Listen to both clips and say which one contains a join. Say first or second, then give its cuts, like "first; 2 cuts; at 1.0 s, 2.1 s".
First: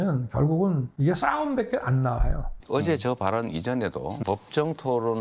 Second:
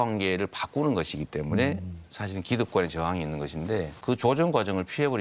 first; 2 cuts; at 2.6 s, 4.2 s